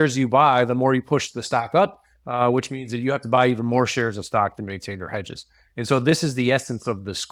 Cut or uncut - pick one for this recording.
uncut